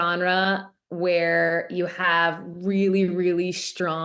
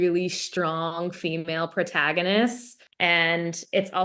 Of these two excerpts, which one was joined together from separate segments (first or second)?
second